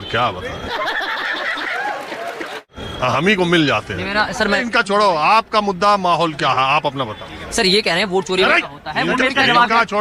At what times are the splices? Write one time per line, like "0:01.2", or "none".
0:04.6